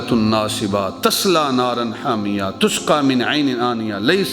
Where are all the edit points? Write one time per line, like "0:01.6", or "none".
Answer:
none